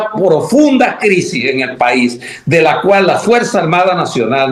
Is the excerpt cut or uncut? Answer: uncut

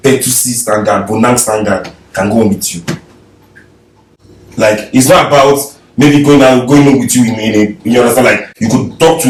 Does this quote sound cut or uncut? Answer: uncut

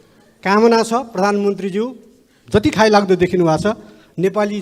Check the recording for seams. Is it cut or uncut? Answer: uncut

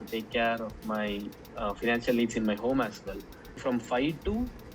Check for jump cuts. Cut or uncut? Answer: cut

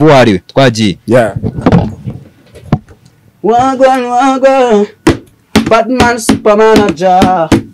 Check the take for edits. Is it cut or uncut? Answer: uncut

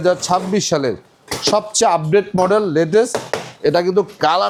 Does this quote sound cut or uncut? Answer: uncut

